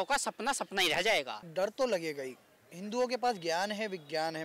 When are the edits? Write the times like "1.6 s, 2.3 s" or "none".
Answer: 1.4 s